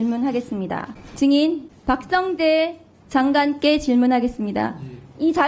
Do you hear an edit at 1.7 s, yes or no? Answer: yes